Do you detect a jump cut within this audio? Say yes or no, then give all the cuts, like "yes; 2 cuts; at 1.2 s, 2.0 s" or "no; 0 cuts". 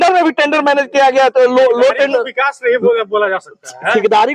no; 0 cuts